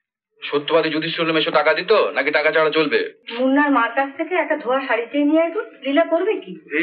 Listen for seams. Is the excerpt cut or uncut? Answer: cut